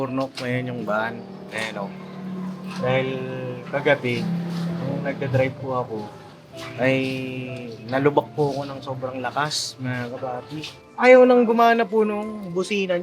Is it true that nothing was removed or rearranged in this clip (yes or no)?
no